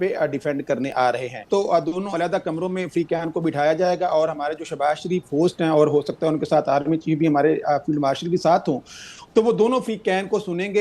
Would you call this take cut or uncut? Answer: cut